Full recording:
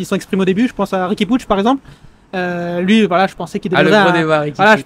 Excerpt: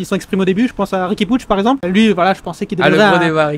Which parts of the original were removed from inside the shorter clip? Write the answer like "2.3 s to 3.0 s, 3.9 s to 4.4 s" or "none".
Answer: 1.8 s to 2.8 s